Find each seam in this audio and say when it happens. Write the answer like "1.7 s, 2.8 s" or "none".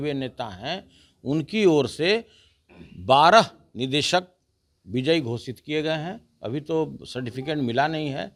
none